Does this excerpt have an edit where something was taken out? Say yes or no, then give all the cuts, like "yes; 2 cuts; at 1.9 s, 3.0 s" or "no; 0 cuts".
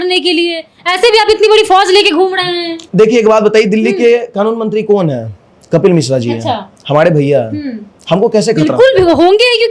no; 0 cuts